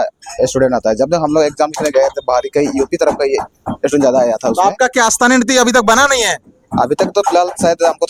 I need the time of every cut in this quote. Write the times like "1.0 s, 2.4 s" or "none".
none